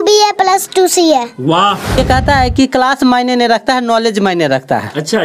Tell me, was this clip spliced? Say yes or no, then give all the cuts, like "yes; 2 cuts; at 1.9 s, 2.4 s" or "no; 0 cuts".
yes; 1 cut; at 2.0 s